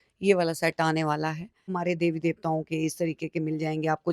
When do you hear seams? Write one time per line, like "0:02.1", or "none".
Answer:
0:01.7